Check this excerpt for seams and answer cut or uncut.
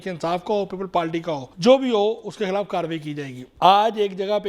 cut